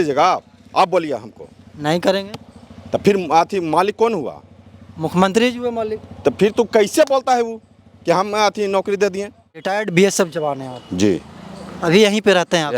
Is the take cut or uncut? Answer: cut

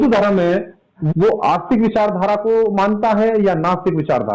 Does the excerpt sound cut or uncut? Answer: cut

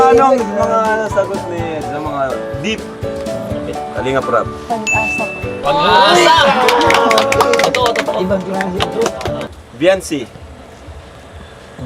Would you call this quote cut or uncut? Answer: cut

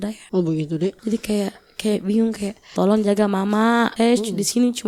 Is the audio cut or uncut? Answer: cut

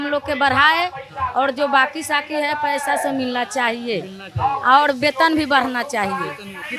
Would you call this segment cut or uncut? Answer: uncut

